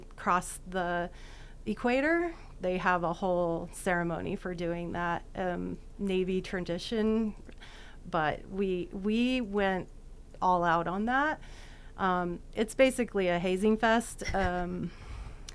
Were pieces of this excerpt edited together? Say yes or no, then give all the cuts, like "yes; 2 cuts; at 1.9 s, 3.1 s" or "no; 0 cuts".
no; 0 cuts